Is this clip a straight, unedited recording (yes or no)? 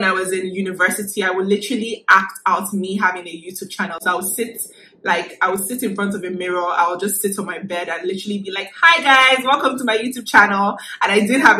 yes